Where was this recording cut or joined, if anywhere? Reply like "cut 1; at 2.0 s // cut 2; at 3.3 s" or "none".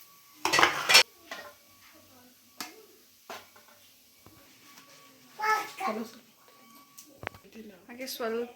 cut 1; at 1.0 s